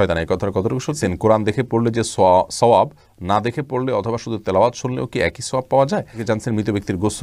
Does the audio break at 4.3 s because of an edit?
no; 2 cuts; at 1.0 s, 6.2 s

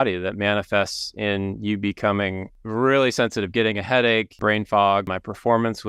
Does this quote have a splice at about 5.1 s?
yes; 3 cuts; at 2.5 s, 4.3 s, 5.1 s

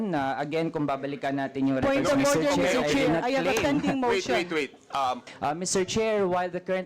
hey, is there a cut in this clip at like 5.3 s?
yes; 1 cut; at 5.3 s

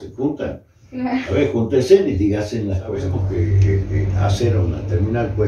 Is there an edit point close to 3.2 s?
yes; 1 cut; at 3.2 s

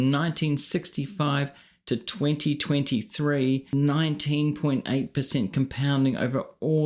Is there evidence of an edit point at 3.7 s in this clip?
yes; 1 cut; at 3.7 s

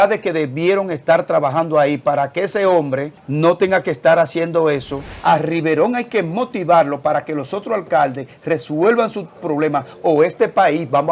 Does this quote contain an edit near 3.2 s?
yes; 2 cuts; at 3.2 s, 5.1 s

